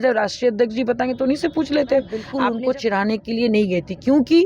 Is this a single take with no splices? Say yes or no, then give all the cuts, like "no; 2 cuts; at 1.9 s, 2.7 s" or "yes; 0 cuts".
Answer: no; 1 cut; at 2.2 s